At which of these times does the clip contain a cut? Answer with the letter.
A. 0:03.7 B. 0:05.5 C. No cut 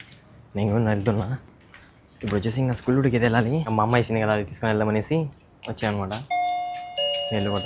A